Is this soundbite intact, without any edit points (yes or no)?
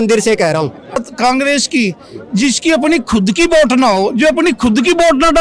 no